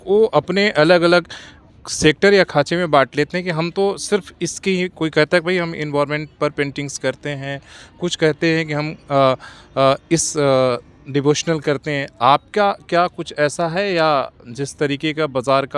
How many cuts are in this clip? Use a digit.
0